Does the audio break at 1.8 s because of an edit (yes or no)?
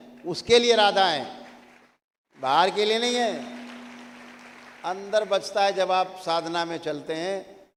no